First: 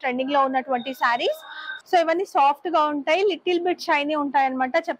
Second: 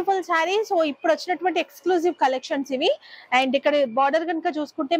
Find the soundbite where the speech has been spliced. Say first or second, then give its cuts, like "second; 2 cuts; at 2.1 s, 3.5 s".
first; 1 cut; at 1.7 s